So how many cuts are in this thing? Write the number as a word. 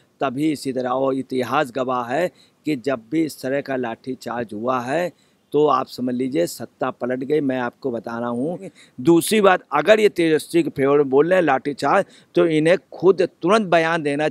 one